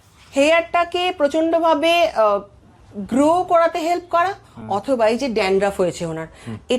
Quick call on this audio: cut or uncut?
uncut